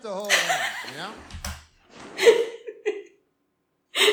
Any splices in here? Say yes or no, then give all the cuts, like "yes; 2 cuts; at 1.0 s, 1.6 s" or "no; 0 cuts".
no; 0 cuts